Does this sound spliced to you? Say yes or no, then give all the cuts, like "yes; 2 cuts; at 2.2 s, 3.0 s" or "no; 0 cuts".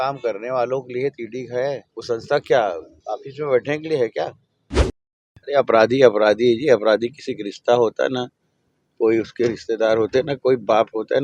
yes; 3 cuts; at 1.9 s, 2.9 s, 5.0 s